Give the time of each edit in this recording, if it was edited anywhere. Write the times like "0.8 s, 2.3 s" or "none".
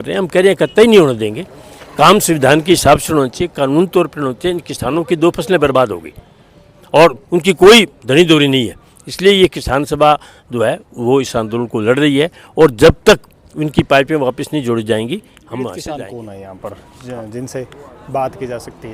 15.8 s